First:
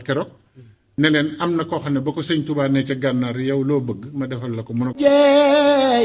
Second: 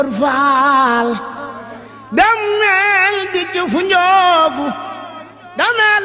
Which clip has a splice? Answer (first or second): first